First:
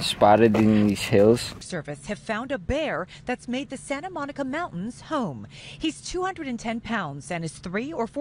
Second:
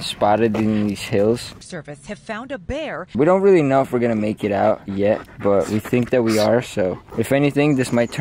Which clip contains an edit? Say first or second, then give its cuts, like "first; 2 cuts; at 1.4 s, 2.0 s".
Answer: second; 2 cuts; at 3.1 s, 7.1 s